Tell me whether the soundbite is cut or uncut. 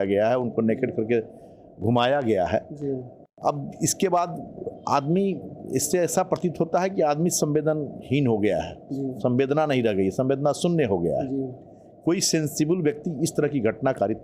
uncut